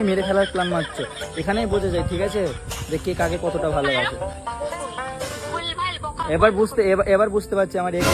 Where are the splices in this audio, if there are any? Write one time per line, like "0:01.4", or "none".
none